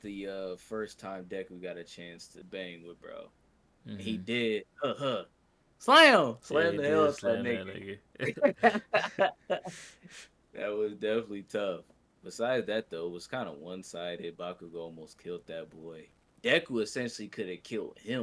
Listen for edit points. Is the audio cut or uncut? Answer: cut